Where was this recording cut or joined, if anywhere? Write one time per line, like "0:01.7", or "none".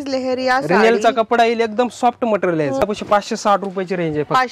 0:02.8